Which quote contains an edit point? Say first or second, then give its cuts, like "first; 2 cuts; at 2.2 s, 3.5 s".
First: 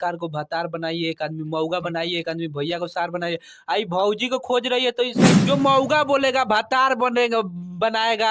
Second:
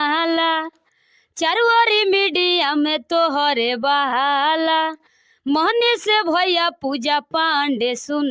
first; 1 cut; at 5.3 s